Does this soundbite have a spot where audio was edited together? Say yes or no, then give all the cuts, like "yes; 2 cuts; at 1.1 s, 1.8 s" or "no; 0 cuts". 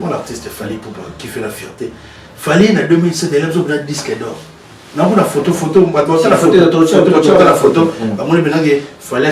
no; 0 cuts